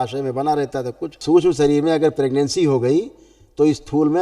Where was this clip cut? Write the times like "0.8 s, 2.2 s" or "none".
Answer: 1.1 s